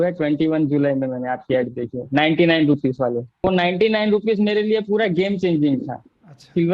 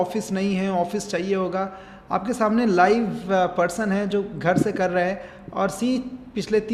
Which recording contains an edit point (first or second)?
first